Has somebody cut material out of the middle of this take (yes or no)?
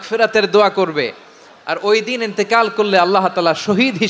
no